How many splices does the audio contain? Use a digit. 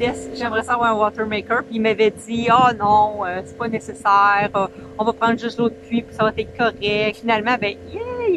1